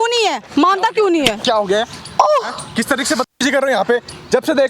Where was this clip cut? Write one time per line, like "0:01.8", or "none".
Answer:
none